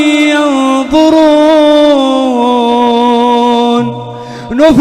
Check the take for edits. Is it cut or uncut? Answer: uncut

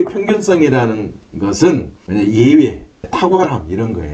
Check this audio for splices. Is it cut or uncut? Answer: cut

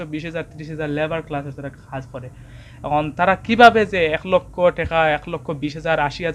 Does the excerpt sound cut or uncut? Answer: uncut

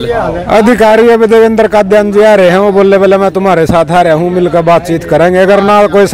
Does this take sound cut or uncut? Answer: uncut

